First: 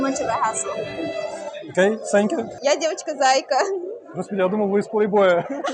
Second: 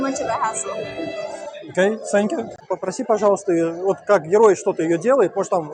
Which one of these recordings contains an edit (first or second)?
first